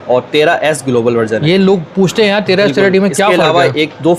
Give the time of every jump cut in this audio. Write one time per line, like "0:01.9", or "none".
none